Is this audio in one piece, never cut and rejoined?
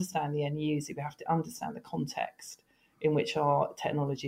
yes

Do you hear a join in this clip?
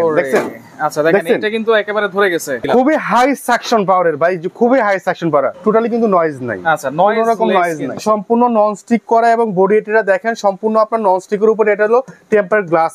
yes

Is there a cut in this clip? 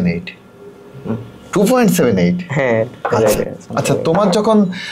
yes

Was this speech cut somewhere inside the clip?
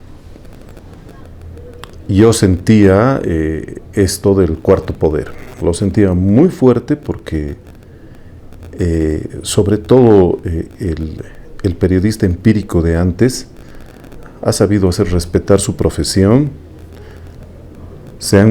no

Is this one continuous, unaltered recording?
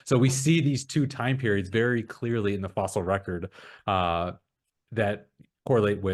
yes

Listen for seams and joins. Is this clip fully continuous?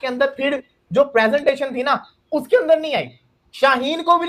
yes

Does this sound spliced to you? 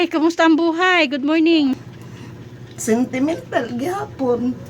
yes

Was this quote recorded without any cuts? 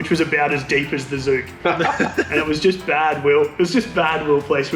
yes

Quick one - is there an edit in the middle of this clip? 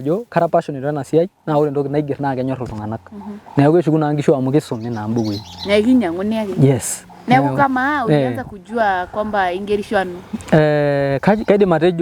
no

